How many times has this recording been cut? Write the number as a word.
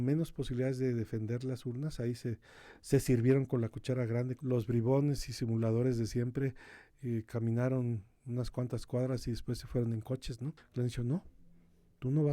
two